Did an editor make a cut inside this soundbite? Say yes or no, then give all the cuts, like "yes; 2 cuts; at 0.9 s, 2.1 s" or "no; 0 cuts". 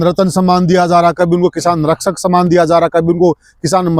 no; 0 cuts